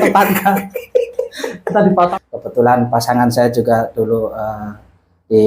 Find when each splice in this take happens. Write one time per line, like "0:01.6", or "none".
0:02.1